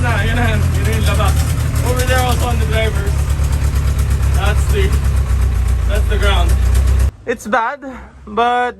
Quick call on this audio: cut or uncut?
cut